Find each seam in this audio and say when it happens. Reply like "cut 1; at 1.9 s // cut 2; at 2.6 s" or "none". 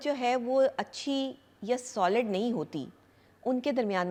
none